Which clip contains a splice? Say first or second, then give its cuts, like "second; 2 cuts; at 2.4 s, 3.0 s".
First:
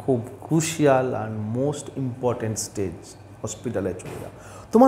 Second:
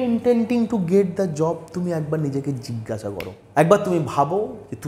second; 1 cut; at 3.3 s